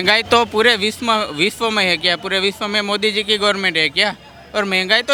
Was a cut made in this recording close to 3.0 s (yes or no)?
no